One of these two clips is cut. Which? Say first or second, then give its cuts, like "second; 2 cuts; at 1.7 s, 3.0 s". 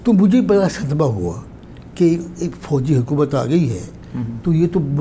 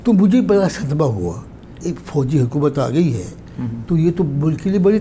second; 1 cut; at 1.7 s